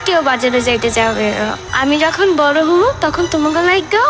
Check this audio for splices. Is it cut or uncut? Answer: cut